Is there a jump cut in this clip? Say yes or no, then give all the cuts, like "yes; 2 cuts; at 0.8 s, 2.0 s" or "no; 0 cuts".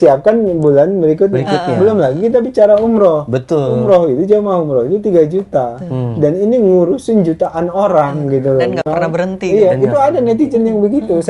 no; 0 cuts